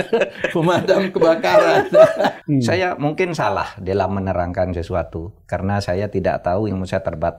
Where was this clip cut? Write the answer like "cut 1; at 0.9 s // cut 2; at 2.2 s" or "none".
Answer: cut 1; at 2.4 s